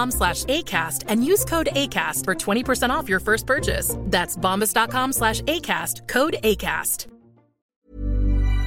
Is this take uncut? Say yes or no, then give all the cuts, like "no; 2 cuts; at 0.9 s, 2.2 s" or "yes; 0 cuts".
no; 1 cut; at 7.8 s